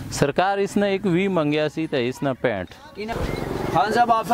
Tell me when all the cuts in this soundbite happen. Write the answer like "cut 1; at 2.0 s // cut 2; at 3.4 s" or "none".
cut 1; at 3.0 s